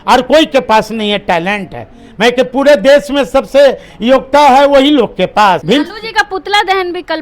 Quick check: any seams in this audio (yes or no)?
yes